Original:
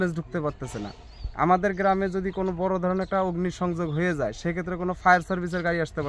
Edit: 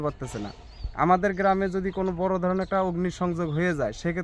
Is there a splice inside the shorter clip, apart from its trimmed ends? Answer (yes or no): no